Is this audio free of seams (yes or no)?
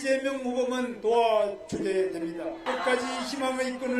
no